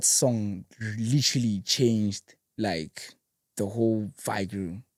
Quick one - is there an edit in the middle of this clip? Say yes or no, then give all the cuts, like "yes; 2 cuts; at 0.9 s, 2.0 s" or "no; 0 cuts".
no; 0 cuts